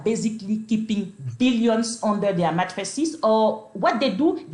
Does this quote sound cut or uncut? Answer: uncut